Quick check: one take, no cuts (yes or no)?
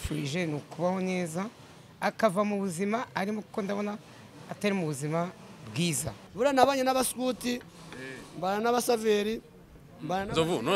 no